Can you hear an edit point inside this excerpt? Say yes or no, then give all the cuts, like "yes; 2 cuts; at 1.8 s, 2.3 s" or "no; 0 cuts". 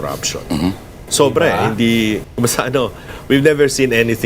yes; 1 cut; at 2.3 s